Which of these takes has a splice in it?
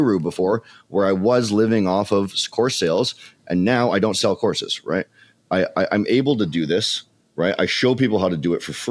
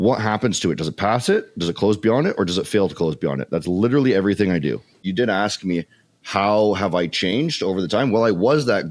second; 1 cut; at 5.0 s

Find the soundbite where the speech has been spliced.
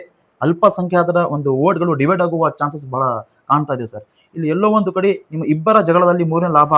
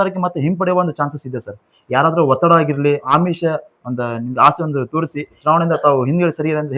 second; 2 cuts; at 3.1 s, 5.4 s

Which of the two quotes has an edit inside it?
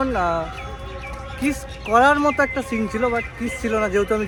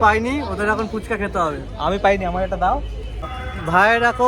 second; 1 cut; at 3.3 s

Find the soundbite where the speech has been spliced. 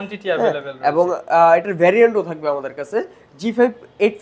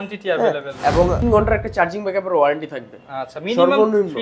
second; 1 cut; at 1.2 s

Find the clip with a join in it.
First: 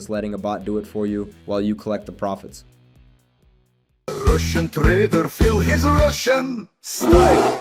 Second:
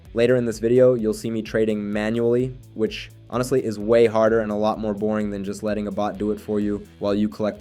first; 1 cut; at 4.1 s

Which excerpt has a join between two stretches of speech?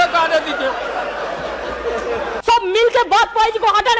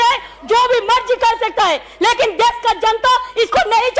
first; 1 cut; at 2.3 s

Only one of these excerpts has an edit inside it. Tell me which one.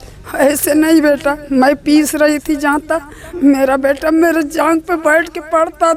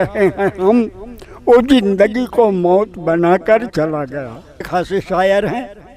second; 1 cut; at 4.6 s

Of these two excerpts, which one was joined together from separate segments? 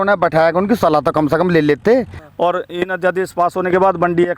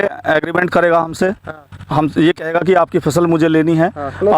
first; 1 cut; at 2.2 s

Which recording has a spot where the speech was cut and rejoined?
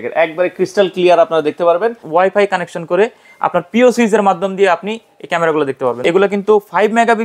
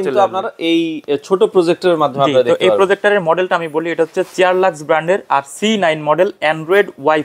first; 2 cuts; at 2.0 s, 6.0 s

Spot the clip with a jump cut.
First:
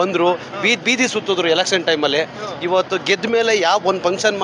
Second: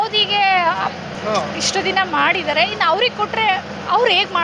second; 1 cut; at 1.1 s

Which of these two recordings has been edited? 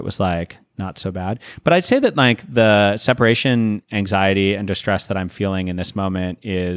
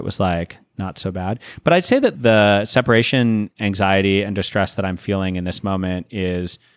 second; 1 cut; at 2.1 s

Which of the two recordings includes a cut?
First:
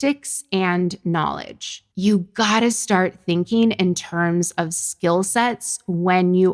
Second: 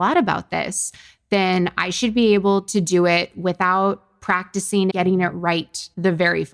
second; 1 cut; at 4.9 s

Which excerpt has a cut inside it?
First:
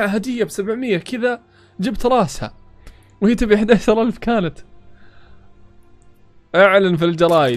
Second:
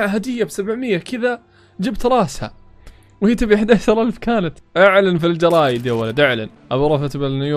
second; 2 cuts; at 4.6 s, 6.5 s

